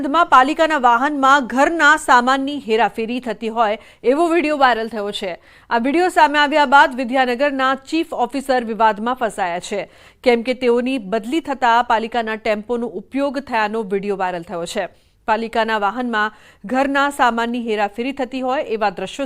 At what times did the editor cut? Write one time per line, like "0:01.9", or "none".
0:14.2